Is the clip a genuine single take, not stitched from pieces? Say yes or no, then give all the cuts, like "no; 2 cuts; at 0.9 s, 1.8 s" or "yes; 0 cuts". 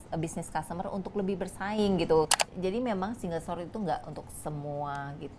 no; 1 cut; at 2.4 s